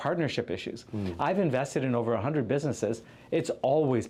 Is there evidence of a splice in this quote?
no; 0 cuts

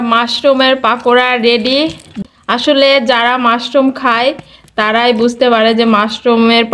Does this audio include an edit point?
yes; 1 cut; at 2.2 s

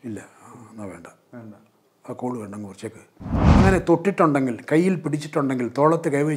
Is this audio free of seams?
no; 1 cut; at 3.4 s

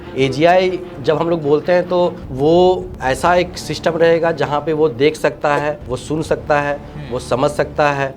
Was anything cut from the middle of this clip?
yes; 4 cuts; at 0.9 s, 2.2 s, 2.9 s, 5.9 s

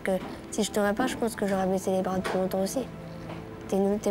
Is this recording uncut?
yes; 0 cuts

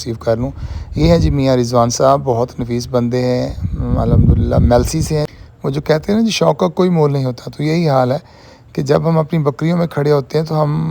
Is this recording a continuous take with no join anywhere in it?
no; 1 cut; at 5.3 s

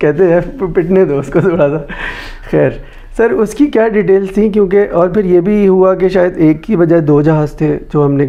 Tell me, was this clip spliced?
no; 0 cuts

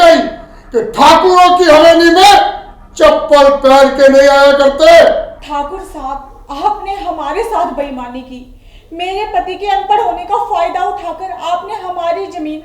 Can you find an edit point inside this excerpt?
yes; 1 cut; at 5.4 s

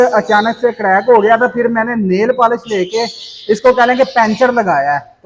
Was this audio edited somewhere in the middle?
no; 0 cuts

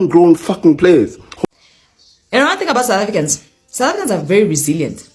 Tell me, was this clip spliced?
yes; 1 cut; at 1.3 s

